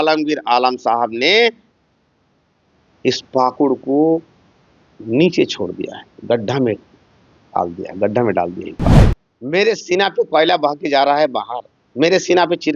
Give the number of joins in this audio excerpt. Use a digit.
1